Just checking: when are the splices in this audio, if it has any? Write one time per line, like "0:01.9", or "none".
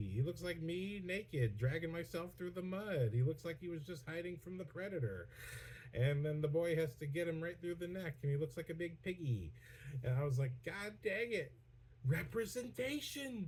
none

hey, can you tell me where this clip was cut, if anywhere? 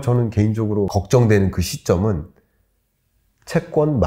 0:00.9

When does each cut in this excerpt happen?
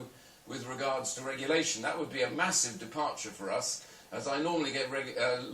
0:02.1

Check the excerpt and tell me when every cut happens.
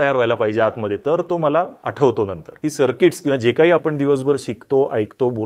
0:01.8
0:02.4

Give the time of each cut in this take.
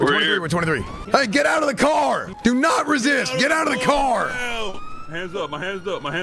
0:00.9
0:02.3

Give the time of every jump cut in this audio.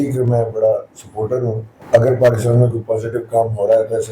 0:01.7

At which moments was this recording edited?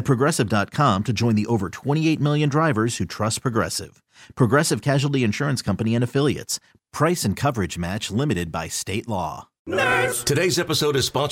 0:09.5

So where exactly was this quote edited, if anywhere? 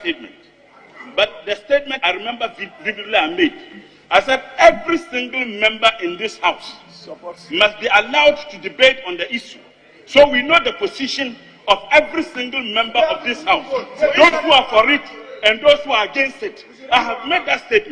0:01.9

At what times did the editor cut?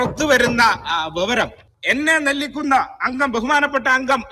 0:01.7

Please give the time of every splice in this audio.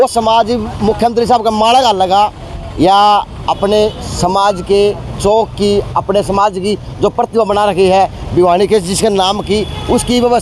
none

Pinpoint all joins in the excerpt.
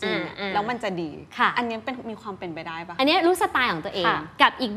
0:02.8

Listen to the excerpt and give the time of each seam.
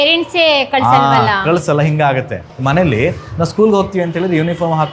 0:02.4

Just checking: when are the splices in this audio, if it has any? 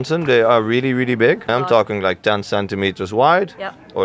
0:01.5

